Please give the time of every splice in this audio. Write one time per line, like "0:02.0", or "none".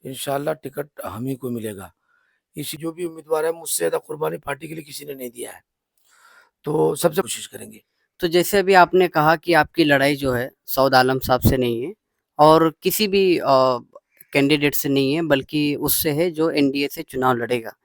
0:02.7
0:07.2